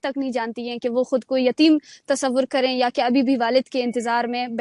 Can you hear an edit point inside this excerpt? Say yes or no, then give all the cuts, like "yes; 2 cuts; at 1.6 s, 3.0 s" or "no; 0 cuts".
no; 0 cuts